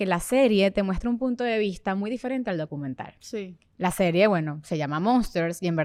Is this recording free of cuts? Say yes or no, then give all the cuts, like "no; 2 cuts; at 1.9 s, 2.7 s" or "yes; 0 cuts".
yes; 0 cuts